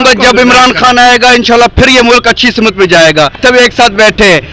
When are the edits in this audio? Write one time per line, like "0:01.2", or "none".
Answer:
0:03.4

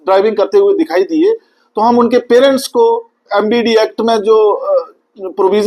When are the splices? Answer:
0:03.2

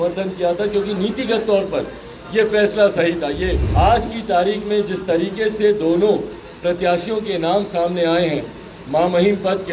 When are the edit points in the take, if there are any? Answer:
0:03.6

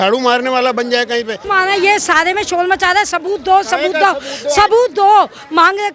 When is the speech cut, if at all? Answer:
0:01.4

